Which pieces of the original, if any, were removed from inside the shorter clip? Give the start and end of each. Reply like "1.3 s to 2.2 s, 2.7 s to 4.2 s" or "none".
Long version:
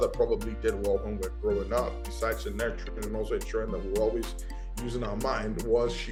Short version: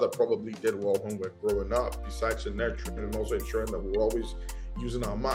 none